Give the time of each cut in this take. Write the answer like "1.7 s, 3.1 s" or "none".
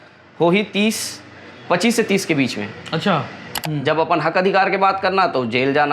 3.5 s